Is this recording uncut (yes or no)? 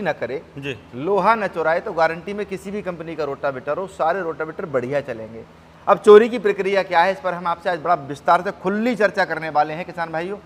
yes